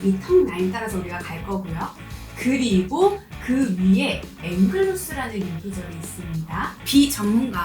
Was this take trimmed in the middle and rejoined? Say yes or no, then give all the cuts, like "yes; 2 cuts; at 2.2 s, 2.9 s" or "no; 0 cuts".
yes; 2 cuts; at 4.4 s, 6.8 s